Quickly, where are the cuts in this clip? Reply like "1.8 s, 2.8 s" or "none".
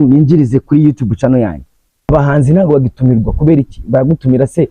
2.1 s